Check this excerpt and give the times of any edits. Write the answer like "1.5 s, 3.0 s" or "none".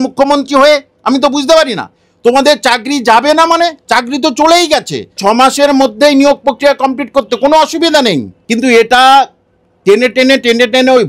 5.2 s, 8.3 s